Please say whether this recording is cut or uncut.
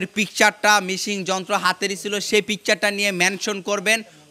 uncut